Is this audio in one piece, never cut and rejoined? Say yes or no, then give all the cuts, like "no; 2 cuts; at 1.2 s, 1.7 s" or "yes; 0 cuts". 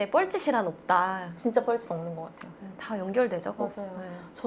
yes; 0 cuts